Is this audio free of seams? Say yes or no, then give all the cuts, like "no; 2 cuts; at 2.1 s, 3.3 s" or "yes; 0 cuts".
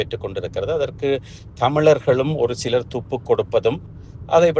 yes; 0 cuts